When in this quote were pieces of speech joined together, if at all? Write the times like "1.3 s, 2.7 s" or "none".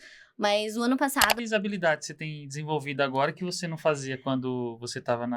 1.4 s